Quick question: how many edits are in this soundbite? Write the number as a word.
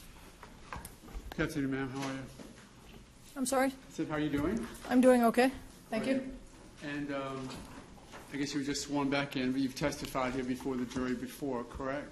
one